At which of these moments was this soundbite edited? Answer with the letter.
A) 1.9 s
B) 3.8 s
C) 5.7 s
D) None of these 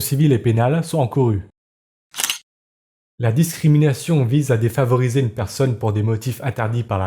A